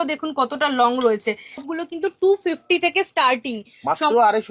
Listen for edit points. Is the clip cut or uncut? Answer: cut